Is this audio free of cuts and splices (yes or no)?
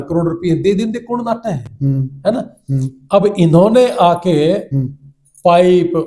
yes